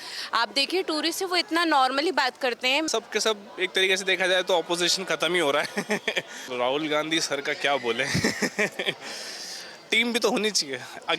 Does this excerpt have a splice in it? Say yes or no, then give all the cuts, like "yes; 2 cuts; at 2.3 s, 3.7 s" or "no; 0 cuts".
yes; 2 cuts; at 2.9 s, 6.5 s